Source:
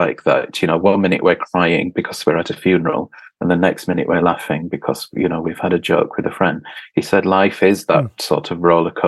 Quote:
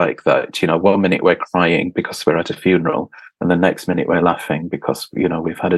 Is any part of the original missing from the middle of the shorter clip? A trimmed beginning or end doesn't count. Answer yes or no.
no